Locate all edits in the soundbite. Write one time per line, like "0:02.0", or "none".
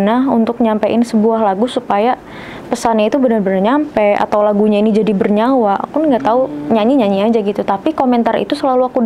none